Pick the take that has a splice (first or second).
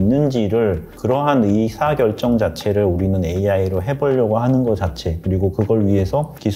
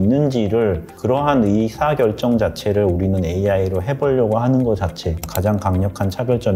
second